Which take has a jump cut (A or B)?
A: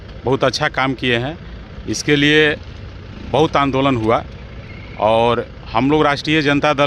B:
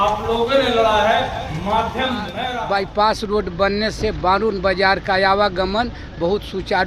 B